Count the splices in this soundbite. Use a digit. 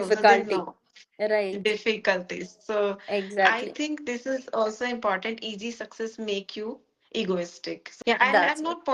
1